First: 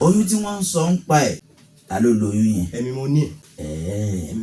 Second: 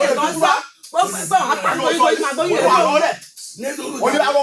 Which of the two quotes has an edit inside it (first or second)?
first